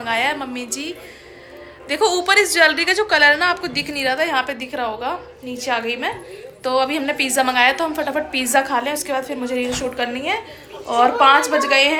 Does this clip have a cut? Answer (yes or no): no